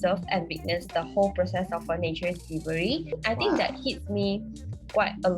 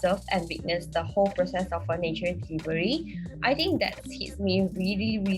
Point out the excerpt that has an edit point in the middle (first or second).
first